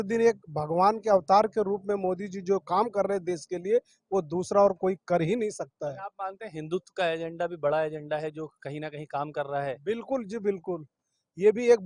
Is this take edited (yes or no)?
no